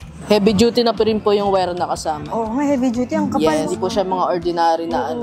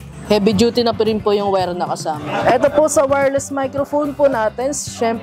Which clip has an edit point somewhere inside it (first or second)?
second